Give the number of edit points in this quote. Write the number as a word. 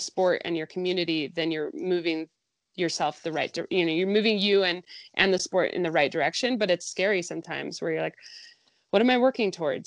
zero